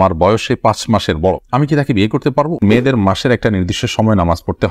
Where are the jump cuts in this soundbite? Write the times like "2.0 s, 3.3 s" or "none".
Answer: 2.6 s